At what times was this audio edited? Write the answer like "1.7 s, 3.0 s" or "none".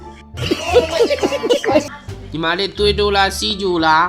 1.9 s